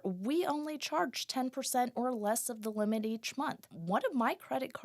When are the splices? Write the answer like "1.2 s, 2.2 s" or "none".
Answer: 3.7 s